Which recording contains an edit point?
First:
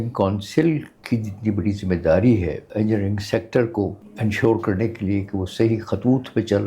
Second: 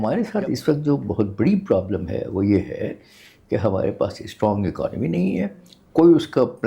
first; 3 cuts; at 0.9 s, 2.7 s, 4.0 s

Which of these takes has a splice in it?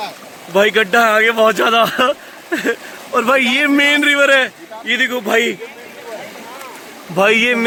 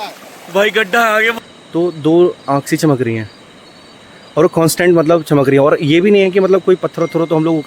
second; 1 cut; at 1.3 s

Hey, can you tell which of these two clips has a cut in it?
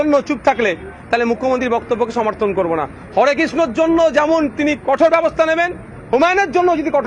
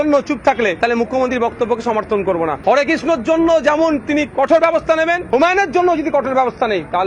second; 3 cuts; at 0.8 s, 2.6 s, 5.2 s

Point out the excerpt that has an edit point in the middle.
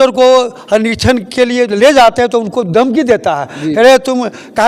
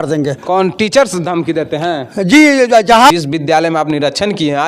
second; 1 cut; at 3.1 s

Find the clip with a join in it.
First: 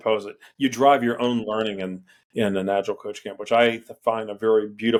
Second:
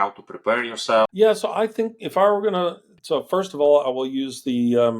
second; 1 cut; at 1.1 s

